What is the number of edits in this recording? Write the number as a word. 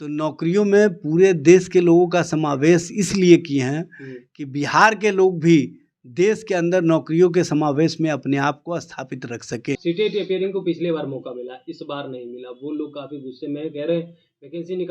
one